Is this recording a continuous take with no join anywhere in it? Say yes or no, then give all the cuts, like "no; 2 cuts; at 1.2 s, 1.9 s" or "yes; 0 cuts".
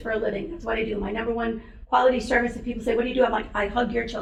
yes; 0 cuts